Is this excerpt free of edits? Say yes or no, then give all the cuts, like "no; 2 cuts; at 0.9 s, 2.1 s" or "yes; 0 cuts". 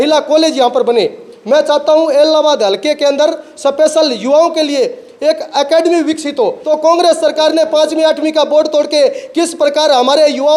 no; 1 cut; at 6.6 s